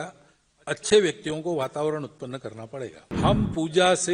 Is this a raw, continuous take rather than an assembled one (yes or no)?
no